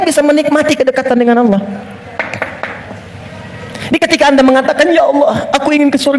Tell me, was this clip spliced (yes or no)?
no